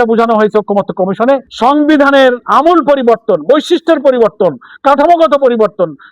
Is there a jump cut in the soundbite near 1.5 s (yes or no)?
yes